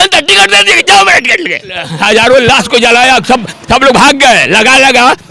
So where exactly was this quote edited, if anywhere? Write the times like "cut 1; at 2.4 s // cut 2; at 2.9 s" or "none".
cut 1; at 1.9 s